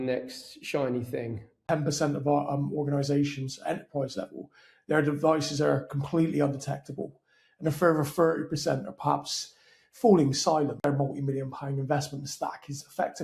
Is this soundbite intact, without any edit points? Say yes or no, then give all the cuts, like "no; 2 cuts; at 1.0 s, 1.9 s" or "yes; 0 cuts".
no; 2 cuts; at 1.6 s, 10.8 s